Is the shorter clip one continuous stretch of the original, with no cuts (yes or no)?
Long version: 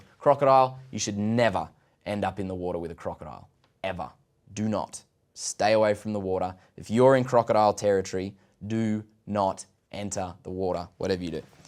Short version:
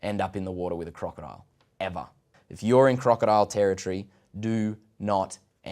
no